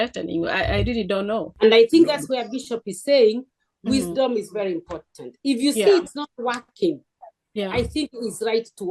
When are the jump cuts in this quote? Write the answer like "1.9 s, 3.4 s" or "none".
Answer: 1.5 s